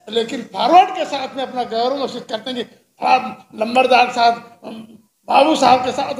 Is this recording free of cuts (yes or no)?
yes